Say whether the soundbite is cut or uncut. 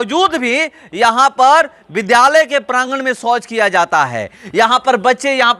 uncut